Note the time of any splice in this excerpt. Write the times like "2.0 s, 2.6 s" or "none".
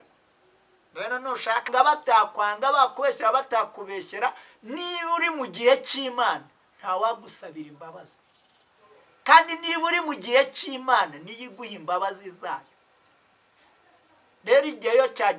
1.7 s